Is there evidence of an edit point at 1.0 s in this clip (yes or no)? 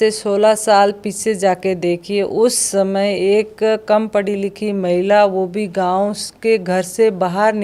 no